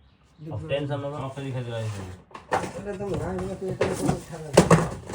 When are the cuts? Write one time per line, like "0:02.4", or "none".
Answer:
0:01.2